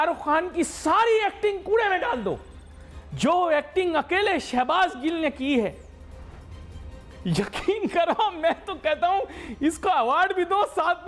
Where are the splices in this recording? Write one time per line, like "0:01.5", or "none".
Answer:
none